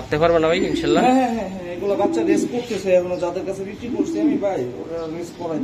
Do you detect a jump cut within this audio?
no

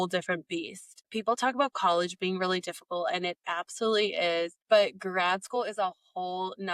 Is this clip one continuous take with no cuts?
yes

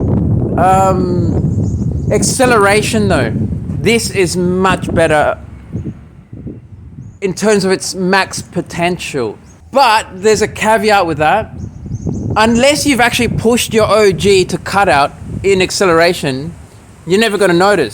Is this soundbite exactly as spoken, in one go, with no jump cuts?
no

